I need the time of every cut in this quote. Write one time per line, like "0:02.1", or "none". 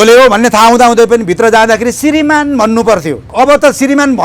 0:03.2